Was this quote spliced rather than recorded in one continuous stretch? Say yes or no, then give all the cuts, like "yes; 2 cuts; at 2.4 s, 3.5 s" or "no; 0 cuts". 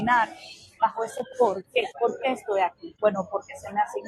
yes; 2 cuts; at 1.9 s, 2.8 s